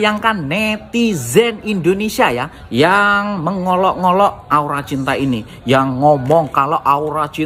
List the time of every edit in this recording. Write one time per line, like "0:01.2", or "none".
none